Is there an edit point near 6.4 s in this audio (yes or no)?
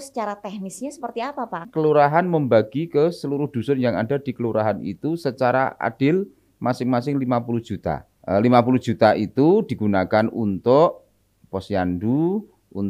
no